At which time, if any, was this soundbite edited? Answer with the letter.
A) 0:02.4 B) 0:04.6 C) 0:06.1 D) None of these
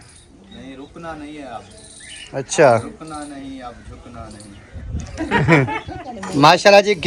C